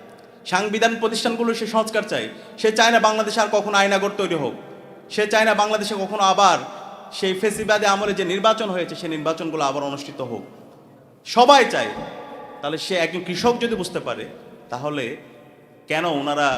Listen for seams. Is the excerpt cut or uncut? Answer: uncut